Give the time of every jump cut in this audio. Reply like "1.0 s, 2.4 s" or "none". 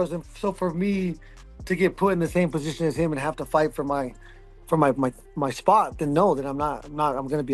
none